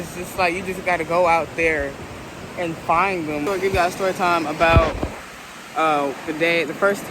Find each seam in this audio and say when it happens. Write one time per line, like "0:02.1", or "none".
0:03.4